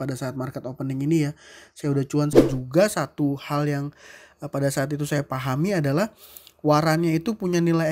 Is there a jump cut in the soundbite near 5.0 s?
no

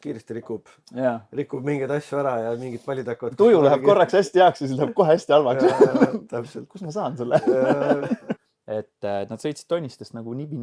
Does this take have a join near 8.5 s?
yes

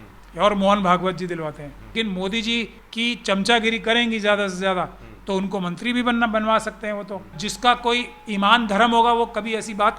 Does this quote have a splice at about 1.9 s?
yes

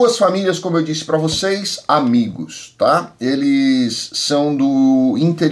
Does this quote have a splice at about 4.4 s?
no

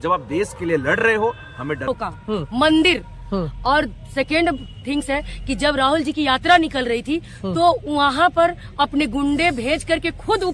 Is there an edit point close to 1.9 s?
yes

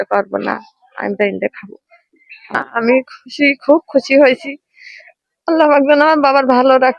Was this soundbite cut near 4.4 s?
no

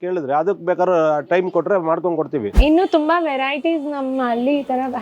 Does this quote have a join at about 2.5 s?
yes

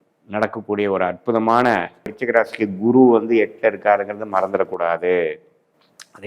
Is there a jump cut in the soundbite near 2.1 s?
yes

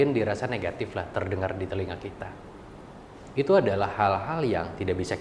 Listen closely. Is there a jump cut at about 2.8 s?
no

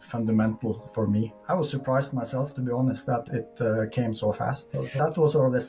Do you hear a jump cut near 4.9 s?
yes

